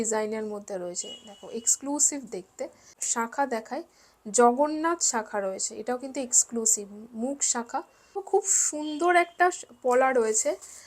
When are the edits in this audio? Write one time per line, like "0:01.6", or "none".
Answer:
0:02.9
0:08.2